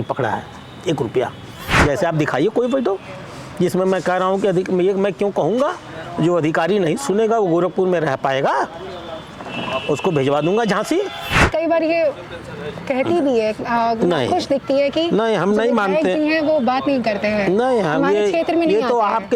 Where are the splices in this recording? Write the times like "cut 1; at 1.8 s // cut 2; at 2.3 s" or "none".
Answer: cut 1; at 1.7 s // cut 2; at 11.5 s

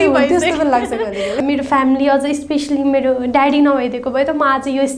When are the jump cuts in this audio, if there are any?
cut 1; at 1.4 s

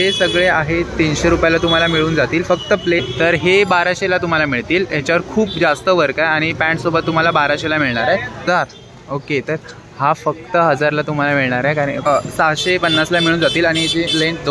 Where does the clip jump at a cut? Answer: cut 1; at 3.0 s // cut 2; at 8.4 s // cut 3; at 12.1 s

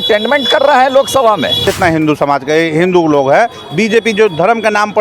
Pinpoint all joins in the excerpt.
cut 1; at 1.7 s

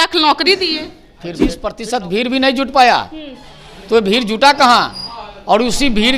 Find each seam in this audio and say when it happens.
cut 1; at 1.7 s

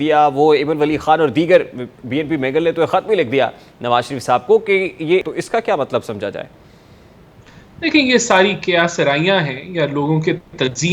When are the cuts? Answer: cut 1; at 5.3 s

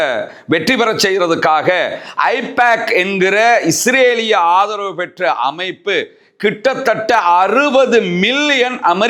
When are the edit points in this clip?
none

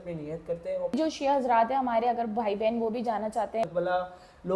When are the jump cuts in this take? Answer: cut 1; at 0.9 s // cut 2; at 3.6 s

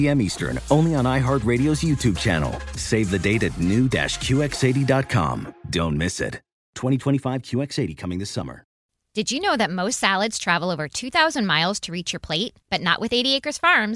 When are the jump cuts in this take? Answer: cut 1; at 8.8 s

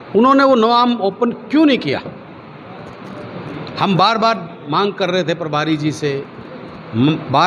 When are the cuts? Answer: none

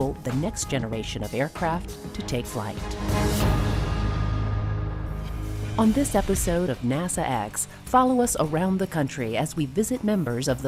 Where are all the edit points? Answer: none

